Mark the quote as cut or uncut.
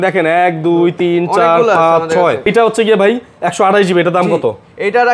cut